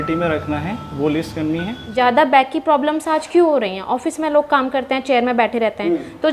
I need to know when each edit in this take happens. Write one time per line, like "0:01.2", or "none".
0:01.8

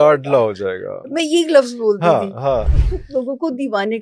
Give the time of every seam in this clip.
0:02.7

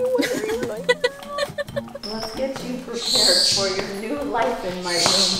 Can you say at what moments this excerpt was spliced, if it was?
0:02.0

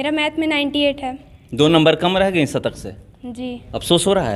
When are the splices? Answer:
none

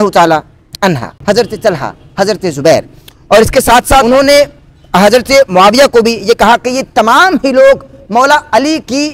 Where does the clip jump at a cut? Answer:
0:01.1
0:04.0

